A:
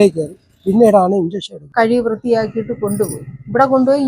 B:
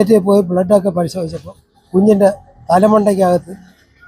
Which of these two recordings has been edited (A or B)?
A